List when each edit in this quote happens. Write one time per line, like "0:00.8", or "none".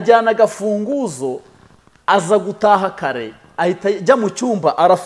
none

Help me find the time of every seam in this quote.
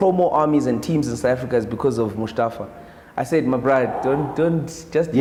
none

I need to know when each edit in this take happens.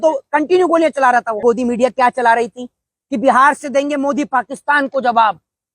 0:01.4

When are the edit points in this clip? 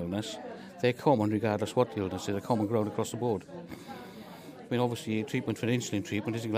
none

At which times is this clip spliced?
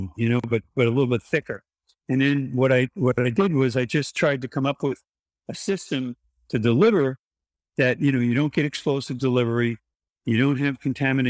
none

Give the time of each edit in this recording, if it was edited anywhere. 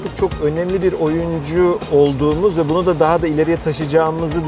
none

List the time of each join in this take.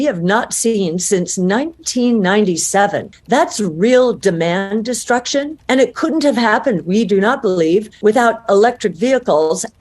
0:03.1
0:05.6
0:07.9

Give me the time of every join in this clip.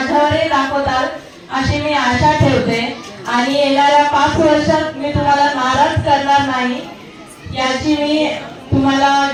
none

